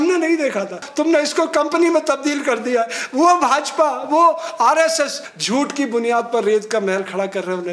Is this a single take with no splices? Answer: no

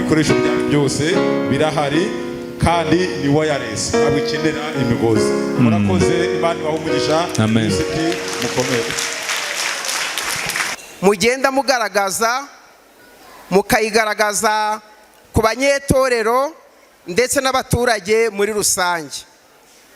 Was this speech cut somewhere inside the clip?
yes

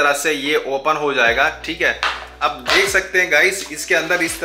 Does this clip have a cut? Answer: no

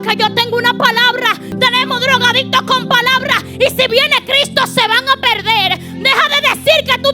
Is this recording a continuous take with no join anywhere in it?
no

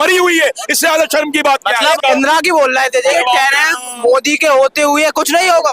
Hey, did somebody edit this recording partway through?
yes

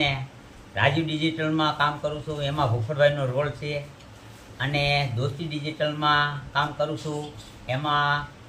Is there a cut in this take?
no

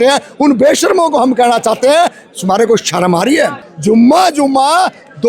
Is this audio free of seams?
no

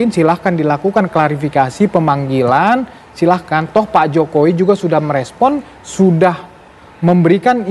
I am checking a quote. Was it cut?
no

